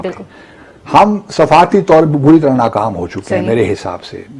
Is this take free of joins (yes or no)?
yes